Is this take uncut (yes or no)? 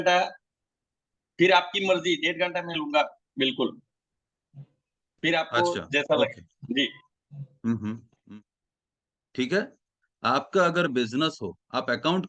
no